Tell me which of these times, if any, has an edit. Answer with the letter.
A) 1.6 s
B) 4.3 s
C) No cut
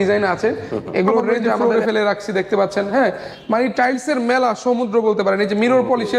A